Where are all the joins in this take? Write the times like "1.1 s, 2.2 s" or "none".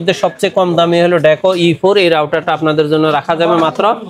none